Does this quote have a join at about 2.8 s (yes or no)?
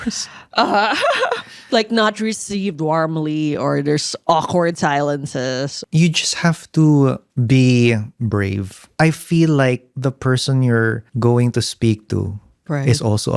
no